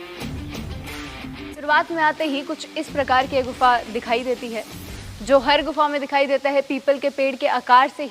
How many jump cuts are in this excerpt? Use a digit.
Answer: 1